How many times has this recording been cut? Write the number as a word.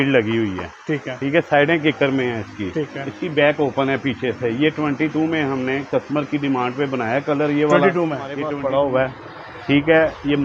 one